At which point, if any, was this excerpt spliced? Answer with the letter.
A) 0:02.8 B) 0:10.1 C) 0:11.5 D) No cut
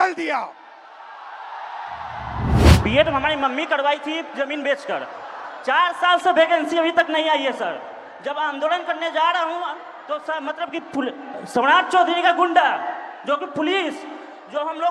A